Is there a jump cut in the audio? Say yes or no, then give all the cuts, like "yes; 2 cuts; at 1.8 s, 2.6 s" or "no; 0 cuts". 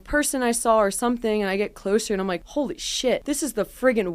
yes; 2 cuts; at 2.4 s, 3.2 s